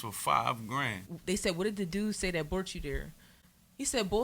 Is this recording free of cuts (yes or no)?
no